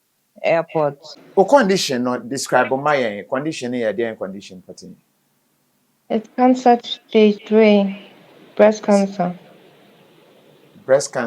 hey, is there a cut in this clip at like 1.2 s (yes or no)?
yes